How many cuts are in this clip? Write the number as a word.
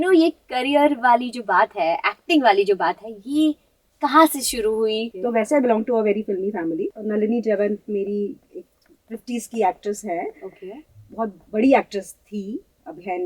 two